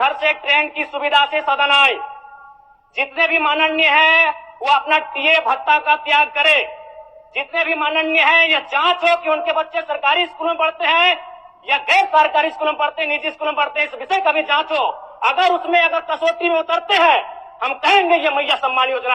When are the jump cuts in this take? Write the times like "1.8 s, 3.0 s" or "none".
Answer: none